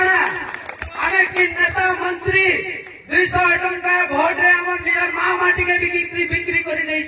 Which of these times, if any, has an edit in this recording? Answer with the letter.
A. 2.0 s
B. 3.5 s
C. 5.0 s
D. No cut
D